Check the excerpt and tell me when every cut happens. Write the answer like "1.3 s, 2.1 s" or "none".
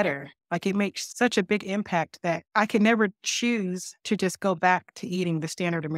1.0 s, 2.4 s, 3.9 s